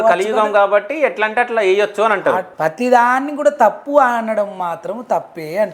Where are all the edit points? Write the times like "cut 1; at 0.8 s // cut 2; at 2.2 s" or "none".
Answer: cut 1; at 2.5 s

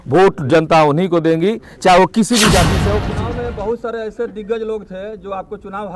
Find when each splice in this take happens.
cut 1; at 2.9 s

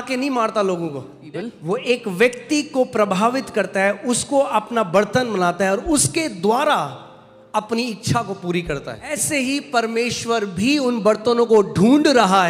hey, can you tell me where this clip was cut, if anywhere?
cut 1; at 1.2 s // cut 2; at 9.1 s

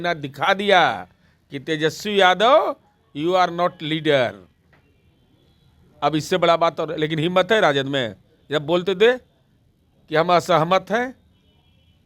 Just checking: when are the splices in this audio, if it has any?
none

